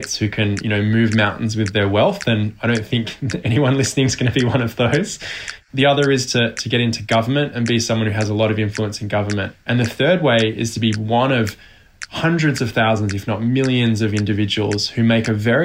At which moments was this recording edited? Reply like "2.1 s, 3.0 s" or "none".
5.6 s, 9.5 s